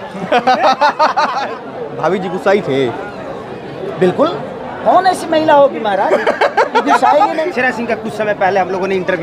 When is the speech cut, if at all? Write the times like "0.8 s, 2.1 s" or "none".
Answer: 1.5 s, 7.5 s